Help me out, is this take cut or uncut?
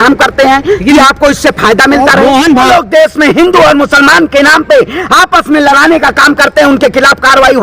cut